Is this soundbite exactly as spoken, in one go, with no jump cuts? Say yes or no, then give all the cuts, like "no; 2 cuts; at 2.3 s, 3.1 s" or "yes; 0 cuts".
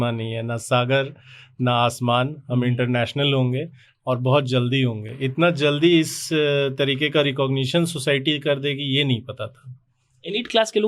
yes; 0 cuts